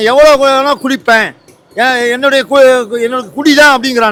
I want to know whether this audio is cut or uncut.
uncut